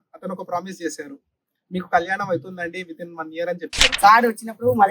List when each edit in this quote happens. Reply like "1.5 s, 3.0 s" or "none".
4.0 s